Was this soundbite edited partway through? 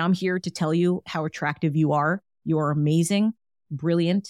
no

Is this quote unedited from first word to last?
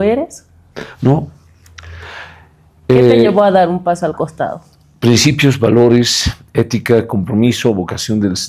yes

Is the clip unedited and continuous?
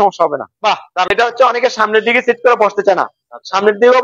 no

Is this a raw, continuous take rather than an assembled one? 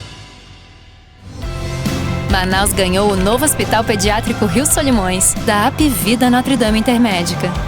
no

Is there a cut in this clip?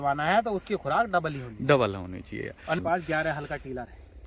yes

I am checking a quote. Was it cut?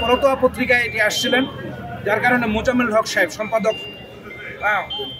no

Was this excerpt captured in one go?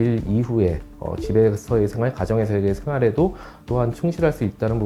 yes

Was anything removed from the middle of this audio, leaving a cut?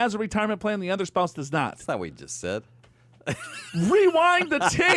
no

